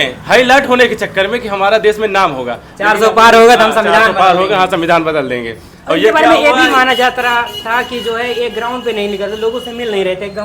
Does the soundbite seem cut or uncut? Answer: uncut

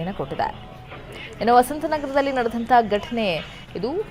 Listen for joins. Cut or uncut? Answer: cut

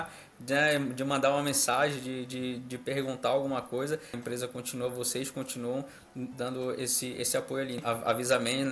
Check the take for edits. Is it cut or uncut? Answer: cut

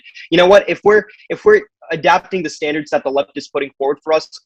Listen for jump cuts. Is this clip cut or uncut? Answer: uncut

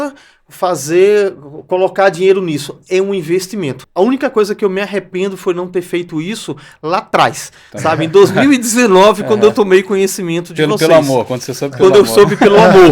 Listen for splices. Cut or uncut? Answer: cut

